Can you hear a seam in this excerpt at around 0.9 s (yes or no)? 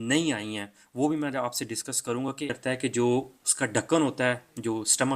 no